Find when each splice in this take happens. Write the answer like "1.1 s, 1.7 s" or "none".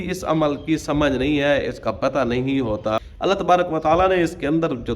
3.1 s